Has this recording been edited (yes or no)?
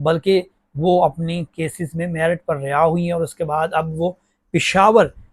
no